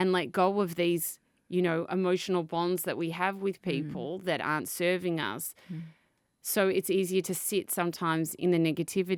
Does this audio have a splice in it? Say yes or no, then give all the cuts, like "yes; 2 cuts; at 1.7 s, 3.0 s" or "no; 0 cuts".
no; 0 cuts